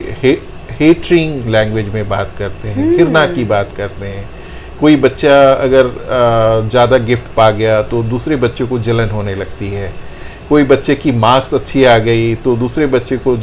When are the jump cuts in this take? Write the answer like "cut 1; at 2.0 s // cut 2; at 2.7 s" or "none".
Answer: none